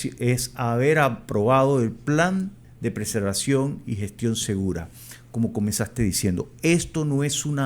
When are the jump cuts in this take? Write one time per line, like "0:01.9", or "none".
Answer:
0:02.6